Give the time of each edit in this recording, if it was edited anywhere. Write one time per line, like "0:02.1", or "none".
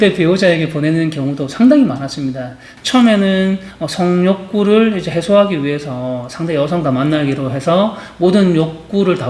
0:02.7

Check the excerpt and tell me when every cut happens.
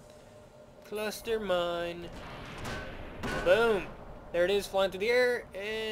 none

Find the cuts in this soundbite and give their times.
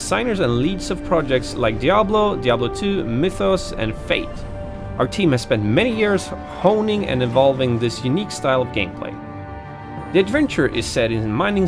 0:09.8

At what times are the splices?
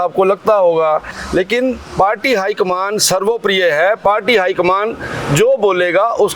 none

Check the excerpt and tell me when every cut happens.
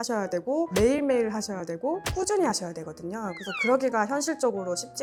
none

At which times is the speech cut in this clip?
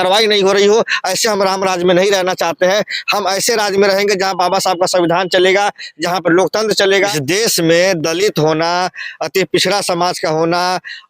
0:07.1

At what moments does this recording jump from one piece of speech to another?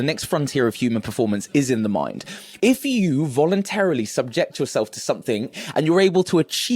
0:02.4
0:05.6

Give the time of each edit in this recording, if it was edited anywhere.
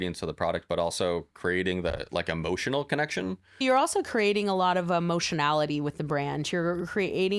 0:03.6

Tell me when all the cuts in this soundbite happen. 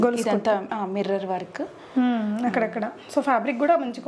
none

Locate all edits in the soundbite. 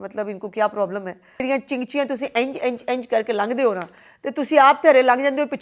0:01.4

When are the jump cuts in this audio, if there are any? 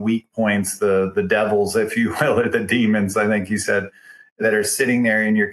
0:04.4

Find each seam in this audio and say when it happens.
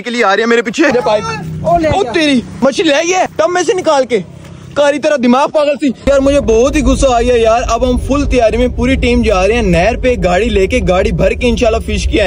0:00.9
0:02.5
0:03.3
0:06.1

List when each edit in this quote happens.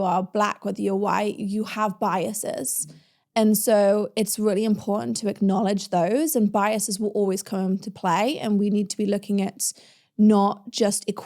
none

